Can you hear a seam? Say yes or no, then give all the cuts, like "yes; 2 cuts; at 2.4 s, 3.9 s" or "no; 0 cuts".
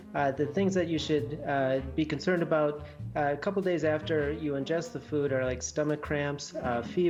no; 0 cuts